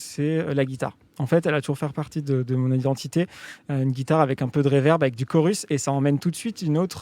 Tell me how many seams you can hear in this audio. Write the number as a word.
zero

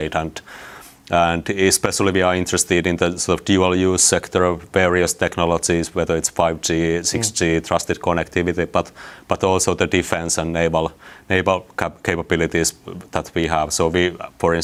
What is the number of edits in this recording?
zero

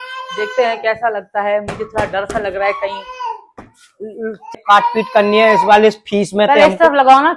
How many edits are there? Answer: one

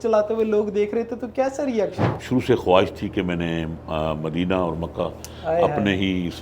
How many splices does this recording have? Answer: one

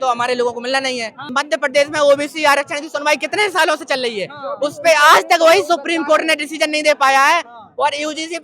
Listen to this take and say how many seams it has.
one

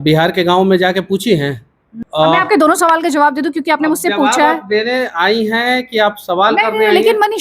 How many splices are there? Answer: one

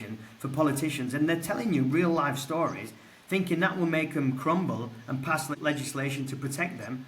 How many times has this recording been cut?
one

